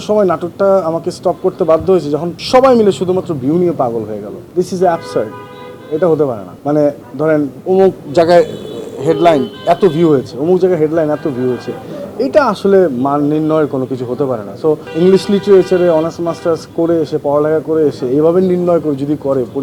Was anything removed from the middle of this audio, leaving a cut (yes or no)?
yes